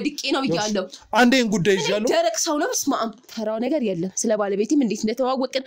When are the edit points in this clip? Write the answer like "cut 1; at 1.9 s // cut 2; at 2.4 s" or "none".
cut 1; at 3.4 s